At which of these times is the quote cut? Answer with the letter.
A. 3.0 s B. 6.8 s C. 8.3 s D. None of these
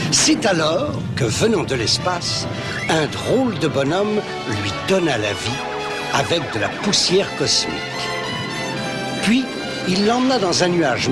B